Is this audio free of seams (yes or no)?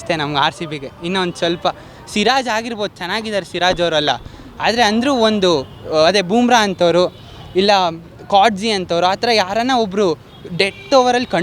yes